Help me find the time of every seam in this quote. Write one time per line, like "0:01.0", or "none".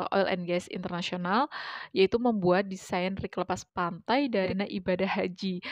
0:04.5